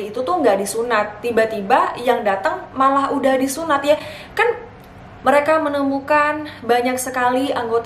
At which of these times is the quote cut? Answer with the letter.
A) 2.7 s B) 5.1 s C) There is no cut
B